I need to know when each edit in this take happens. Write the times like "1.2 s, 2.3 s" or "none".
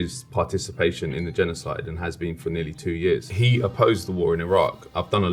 3.3 s